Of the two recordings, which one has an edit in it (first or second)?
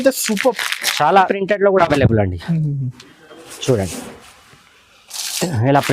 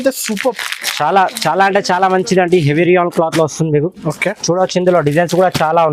first